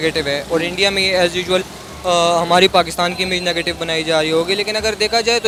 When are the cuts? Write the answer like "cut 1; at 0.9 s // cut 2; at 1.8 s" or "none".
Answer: none